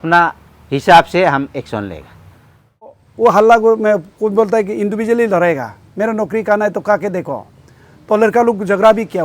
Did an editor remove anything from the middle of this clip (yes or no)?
yes